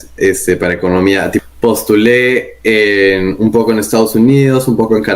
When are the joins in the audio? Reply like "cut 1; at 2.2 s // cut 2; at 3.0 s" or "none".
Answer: cut 1; at 1.4 s